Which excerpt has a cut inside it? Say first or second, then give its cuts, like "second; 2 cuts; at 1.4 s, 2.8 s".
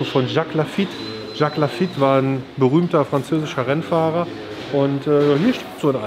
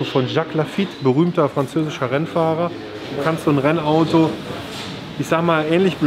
second; 2 cuts; at 0.9 s, 3.1 s